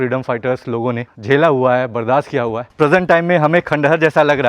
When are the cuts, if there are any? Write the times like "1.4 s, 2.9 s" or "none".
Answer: 1.1 s, 2.6 s